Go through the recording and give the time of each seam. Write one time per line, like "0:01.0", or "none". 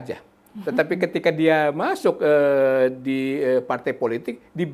none